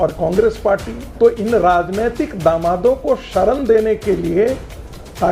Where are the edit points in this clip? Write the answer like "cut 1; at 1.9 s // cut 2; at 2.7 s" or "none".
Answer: cut 1; at 1.0 s